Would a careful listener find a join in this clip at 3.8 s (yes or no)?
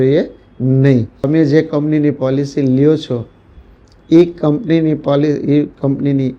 no